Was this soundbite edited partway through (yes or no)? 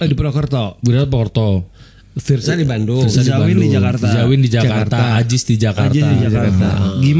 no